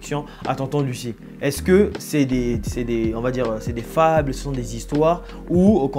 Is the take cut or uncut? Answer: uncut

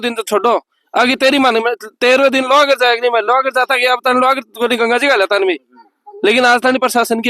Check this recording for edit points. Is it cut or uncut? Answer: uncut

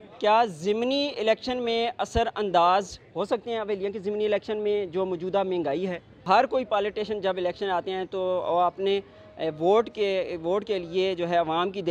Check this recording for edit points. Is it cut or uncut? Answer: cut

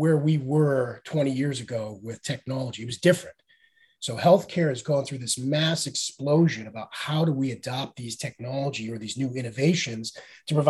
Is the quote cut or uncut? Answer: uncut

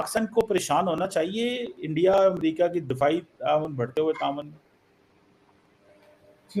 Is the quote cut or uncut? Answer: uncut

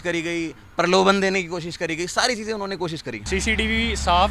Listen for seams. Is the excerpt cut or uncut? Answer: cut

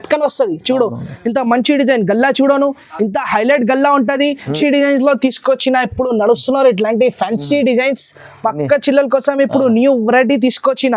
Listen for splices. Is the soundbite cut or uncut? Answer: cut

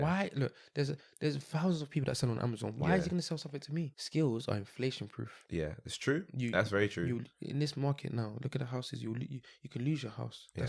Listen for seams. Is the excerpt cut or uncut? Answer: cut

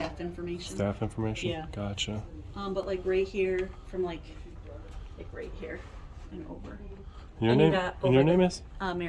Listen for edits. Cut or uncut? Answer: uncut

